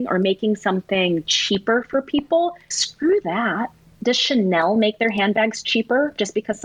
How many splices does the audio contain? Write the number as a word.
one